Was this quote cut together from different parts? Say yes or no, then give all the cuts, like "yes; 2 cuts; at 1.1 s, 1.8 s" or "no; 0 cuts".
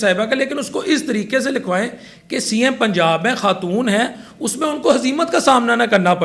no; 0 cuts